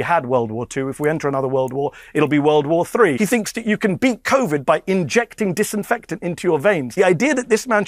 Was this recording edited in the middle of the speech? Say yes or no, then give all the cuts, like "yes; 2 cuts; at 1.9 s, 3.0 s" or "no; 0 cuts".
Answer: yes; 2 cuts; at 3.2 s, 6.9 s